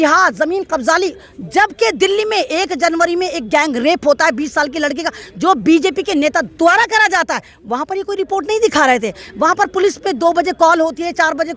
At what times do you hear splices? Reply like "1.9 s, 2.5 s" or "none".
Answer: none